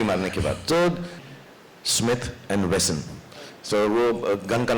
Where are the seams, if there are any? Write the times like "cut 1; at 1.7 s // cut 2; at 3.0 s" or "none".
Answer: cut 1; at 1.2 s